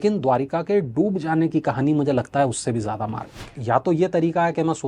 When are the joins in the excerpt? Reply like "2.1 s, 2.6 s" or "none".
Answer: 3.5 s